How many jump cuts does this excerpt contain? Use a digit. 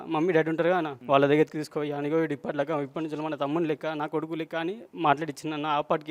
1